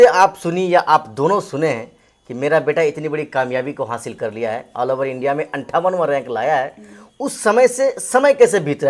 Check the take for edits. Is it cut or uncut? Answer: uncut